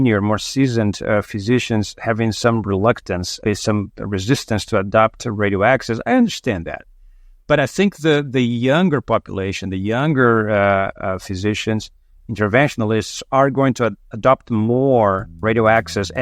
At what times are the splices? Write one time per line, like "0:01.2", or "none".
0:15.3